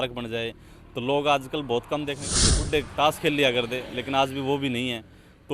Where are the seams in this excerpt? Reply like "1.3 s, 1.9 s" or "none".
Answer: 2.6 s